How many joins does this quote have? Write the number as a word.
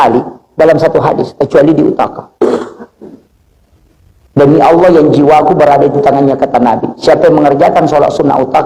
zero